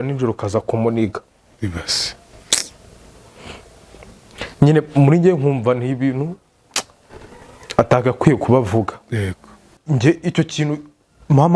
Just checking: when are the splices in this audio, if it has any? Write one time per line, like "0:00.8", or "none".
0:09.7